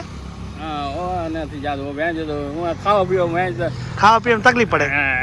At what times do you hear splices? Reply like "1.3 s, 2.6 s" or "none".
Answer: none